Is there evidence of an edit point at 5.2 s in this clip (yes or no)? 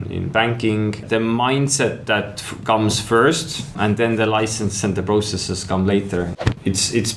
no